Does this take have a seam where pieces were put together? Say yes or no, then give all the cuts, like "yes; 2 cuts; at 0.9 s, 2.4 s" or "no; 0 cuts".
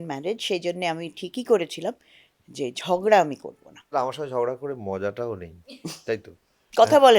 yes; 1 cut; at 3.9 s